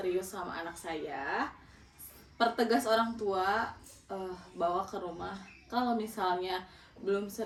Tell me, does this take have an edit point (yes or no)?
no